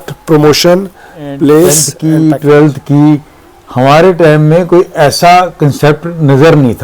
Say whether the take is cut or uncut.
cut